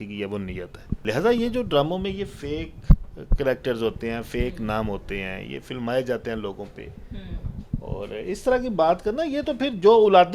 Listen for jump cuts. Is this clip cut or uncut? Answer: cut